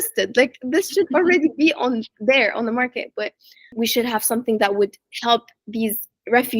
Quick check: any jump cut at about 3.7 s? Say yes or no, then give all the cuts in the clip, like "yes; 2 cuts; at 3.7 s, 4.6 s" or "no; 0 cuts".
yes; 1 cut; at 3.7 s